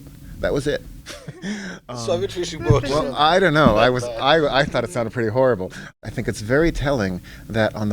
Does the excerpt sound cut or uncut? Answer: cut